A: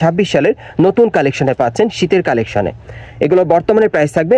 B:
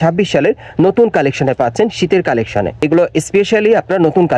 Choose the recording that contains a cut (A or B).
B